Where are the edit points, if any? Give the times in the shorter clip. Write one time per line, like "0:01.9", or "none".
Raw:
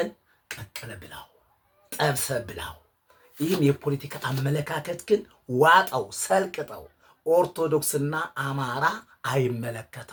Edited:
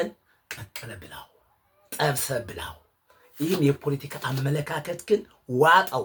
none